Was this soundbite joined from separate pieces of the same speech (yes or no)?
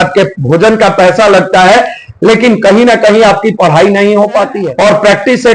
yes